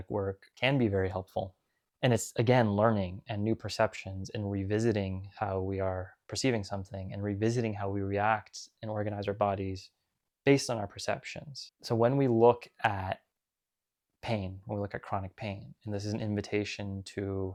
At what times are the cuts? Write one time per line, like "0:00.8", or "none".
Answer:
none

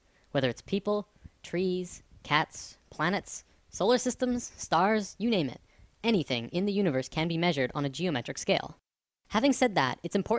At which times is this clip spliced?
none

